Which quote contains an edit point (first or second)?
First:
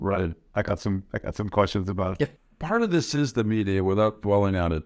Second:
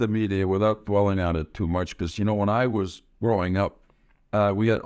first